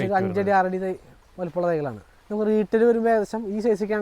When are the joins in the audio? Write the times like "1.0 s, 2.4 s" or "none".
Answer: 2.1 s